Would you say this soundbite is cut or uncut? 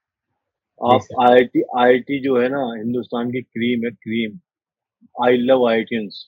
uncut